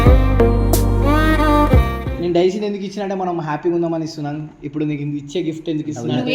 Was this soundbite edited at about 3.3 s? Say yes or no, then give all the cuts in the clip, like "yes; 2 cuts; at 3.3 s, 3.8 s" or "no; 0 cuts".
no; 1 cut; at 2.0 s